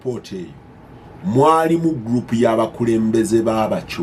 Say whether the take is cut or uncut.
uncut